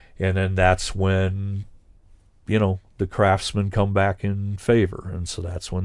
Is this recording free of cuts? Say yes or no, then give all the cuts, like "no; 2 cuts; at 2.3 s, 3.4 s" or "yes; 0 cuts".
yes; 0 cuts